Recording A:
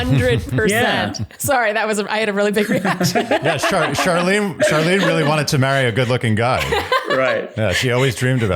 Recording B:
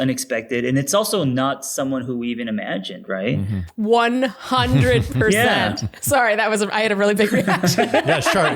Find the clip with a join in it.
B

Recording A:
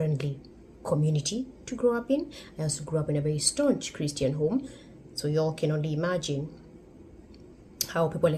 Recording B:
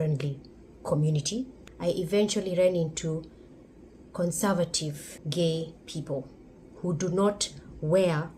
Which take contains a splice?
B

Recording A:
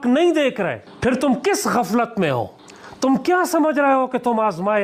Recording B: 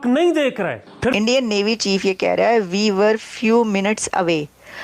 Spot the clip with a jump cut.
B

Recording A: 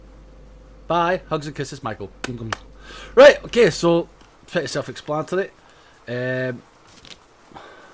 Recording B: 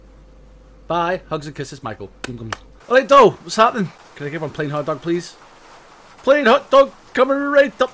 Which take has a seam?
B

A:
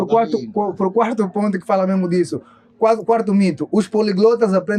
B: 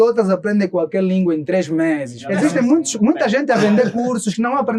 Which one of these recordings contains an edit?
B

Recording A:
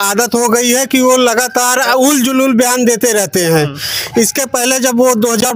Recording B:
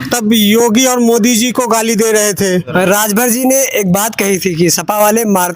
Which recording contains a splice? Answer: B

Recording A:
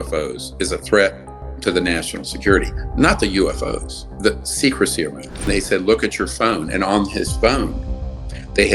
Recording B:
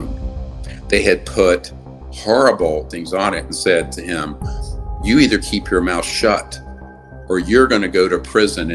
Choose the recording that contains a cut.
A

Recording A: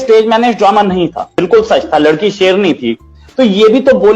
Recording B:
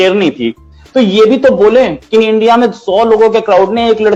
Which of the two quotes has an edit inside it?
A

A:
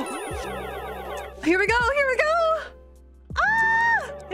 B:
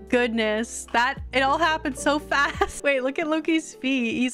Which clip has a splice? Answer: B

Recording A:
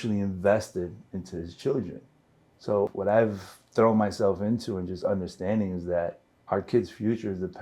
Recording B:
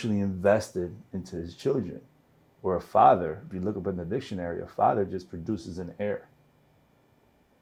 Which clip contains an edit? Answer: A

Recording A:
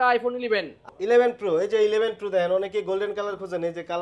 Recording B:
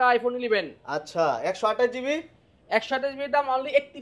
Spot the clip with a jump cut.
A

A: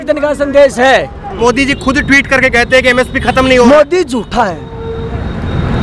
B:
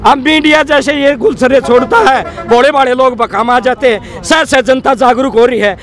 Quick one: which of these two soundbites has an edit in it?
A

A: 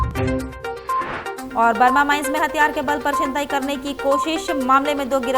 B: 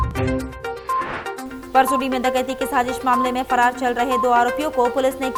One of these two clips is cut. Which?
A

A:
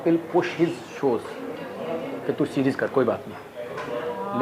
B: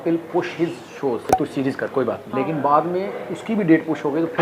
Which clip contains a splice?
B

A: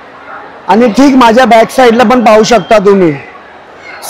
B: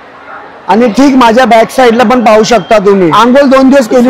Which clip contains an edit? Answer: B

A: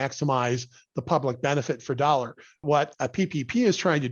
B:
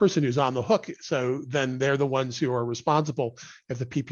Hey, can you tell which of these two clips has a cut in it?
A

